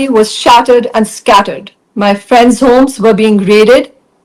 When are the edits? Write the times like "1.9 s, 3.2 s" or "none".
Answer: none